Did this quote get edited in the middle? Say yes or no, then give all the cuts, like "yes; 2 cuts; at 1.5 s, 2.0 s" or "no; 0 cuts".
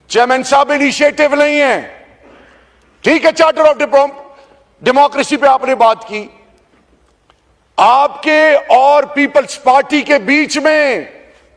no; 0 cuts